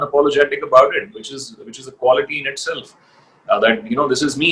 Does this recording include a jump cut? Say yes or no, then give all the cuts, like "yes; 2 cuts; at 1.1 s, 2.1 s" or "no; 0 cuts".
no; 0 cuts